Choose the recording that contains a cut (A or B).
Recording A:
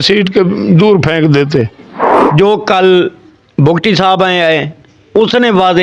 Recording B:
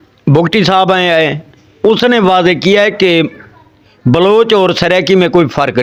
A